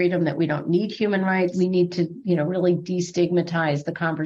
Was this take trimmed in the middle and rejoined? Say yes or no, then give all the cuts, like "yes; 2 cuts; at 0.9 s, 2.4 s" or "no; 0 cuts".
yes; 1 cut; at 1.5 s